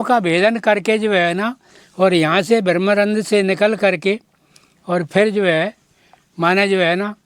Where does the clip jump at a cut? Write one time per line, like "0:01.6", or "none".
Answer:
none